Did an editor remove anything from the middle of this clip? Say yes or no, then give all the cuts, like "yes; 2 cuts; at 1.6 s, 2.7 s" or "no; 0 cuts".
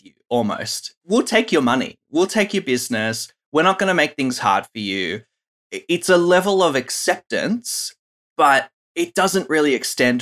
yes; 1 cut; at 1.0 s